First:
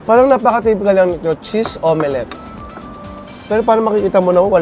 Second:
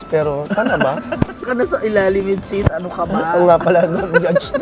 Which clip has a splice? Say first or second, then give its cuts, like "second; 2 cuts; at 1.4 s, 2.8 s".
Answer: second; 1 cut; at 1.4 s